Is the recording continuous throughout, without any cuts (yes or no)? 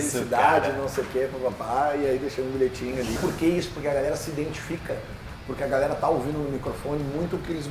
no